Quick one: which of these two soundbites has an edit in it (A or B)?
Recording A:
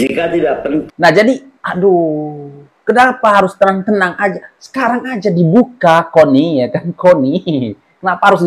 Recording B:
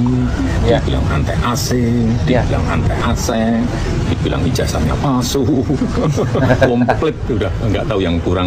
A